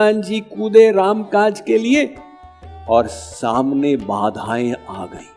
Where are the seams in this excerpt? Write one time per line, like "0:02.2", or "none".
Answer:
none